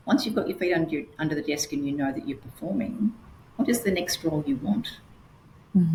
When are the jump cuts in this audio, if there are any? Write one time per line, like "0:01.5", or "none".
none